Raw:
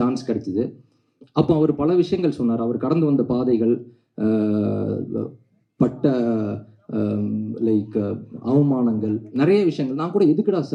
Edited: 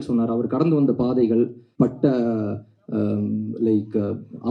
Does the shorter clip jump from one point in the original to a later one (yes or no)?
yes